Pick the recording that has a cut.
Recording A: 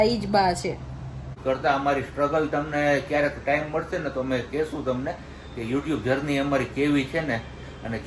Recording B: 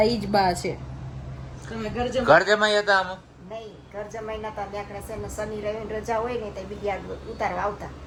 A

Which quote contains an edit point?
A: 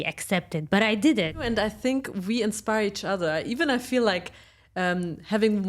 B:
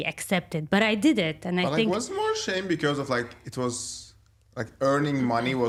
A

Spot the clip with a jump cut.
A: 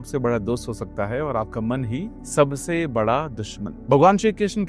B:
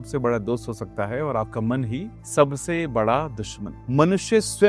B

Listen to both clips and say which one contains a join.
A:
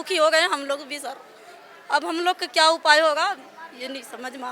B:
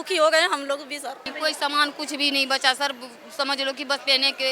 B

